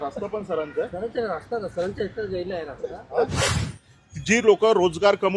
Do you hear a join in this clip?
yes; 1 cut; at 3.6 s

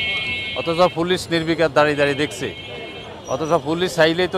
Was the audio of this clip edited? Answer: no; 0 cuts

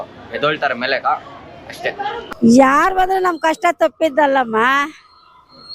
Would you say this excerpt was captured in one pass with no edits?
yes; 0 cuts

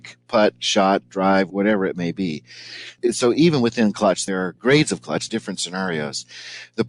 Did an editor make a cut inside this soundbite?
yes; 4 cuts; at 1.5 s, 2.9 s, 4.2 s, 5.2 s

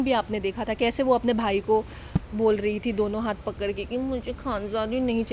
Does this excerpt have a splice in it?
no; 0 cuts

